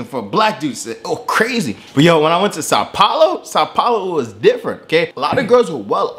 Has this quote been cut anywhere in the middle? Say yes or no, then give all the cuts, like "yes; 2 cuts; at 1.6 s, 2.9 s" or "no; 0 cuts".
yes; 1 cut; at 2.6 s